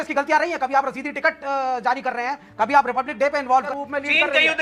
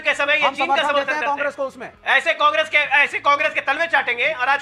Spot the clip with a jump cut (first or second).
first